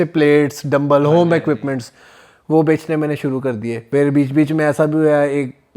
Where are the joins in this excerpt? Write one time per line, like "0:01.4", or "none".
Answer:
0:03.8